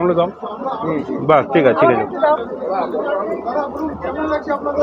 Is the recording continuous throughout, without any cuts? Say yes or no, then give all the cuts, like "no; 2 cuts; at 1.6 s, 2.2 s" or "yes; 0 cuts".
yes; 0 cuts